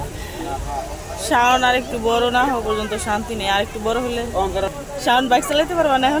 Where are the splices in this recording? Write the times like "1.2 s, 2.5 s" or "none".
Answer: 4.7 s